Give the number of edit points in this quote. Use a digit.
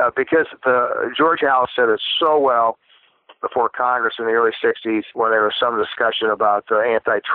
1